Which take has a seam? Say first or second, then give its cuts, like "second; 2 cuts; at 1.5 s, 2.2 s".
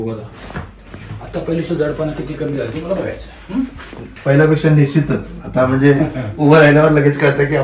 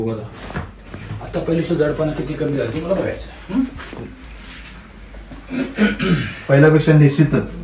first; 1 cut; at 4.1 s